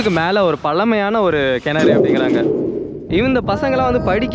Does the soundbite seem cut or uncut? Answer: cut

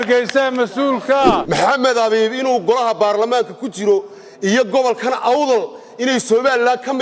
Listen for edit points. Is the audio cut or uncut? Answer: cut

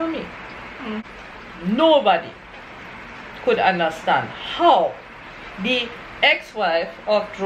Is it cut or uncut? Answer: cut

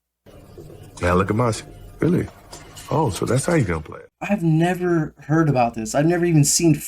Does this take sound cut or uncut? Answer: cut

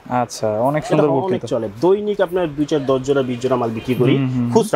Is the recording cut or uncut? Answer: uncut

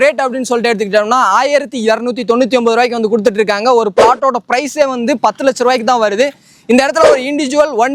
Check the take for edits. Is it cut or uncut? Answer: uncut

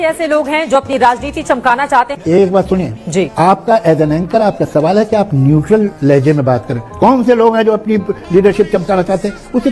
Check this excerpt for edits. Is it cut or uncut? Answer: uncut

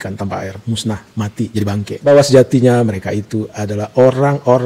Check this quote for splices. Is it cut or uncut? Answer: cut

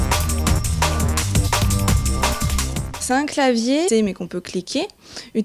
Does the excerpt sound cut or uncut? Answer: uncut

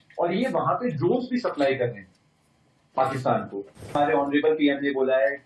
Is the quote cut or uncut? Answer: cut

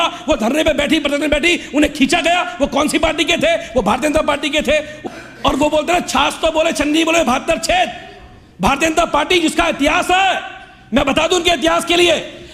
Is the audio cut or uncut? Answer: cut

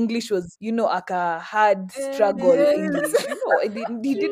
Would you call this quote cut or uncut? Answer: uncut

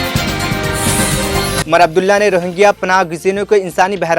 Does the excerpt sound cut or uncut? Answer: cut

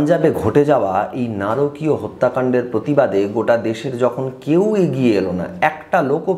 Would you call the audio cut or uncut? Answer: uncut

